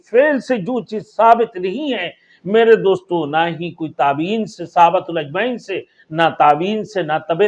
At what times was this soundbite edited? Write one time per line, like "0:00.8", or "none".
none